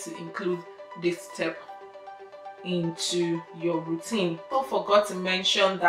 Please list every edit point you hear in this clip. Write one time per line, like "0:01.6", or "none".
0:04.4